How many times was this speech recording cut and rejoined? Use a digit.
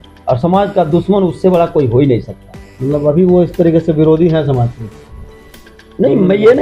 0